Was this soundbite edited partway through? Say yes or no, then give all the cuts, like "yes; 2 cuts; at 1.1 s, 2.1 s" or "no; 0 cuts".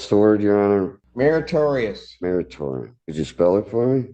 yes; 2 cuts; at 1.0 s, 2.9 s